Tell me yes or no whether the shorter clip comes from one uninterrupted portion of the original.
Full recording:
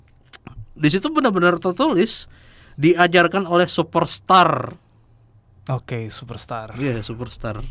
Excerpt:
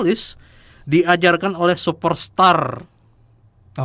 yes